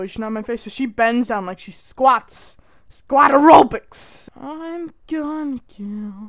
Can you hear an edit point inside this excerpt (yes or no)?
yes